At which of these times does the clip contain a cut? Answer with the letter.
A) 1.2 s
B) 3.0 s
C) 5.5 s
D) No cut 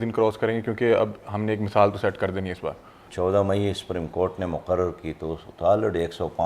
B